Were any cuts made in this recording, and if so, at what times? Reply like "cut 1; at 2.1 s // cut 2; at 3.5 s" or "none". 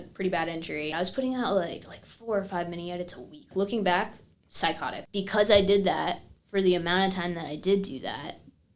cut 1; at 0.9 s // cut 2; at 3.5 s // cut 3; at 4.9 s